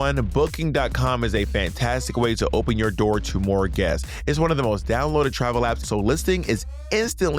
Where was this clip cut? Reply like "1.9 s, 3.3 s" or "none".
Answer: 5.9 s